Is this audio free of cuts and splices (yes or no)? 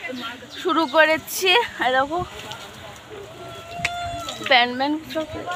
yes